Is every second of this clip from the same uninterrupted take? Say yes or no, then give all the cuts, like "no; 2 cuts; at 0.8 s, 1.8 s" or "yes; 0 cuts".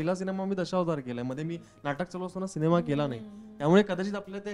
yes; 0 cuts